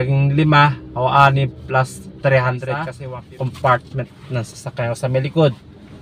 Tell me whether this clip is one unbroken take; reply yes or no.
no